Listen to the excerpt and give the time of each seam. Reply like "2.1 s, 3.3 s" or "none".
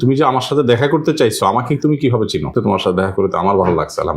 2.5 s